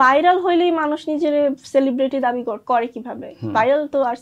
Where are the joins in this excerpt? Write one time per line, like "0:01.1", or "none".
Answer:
none